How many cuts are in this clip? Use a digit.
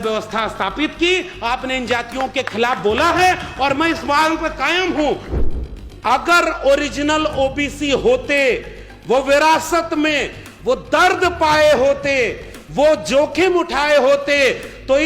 1